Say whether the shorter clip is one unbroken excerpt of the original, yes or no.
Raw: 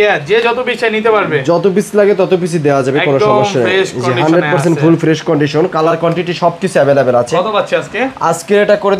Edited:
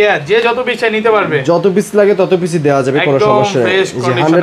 yes